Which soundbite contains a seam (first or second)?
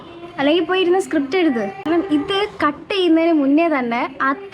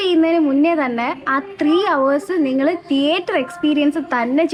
first